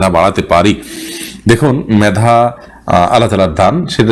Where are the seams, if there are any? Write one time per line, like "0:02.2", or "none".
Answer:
none